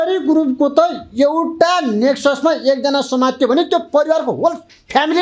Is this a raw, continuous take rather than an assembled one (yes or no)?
yes